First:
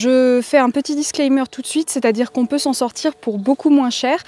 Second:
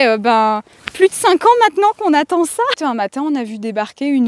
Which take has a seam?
second; 1 cut; at 2.8 s

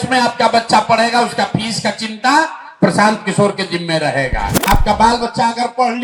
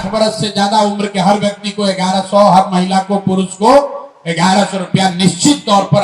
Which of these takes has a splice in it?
first; 1 cut; at 4.7 s

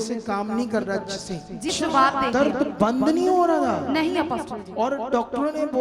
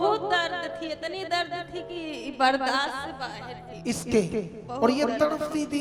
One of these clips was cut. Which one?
first; 1 cut; at 1.7 s

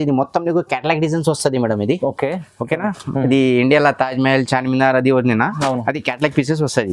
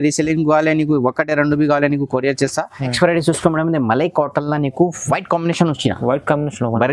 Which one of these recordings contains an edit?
second; 1 cut; at 2.8 s

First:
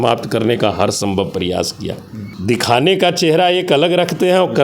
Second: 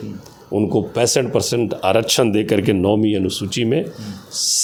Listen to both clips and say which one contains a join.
first; 1 cut; at 2.2 s

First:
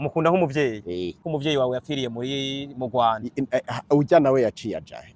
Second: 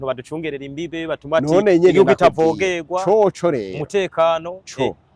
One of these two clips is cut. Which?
first; 1 cut; at 1.3 s

